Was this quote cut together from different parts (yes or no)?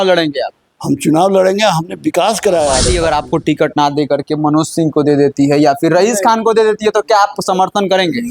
yes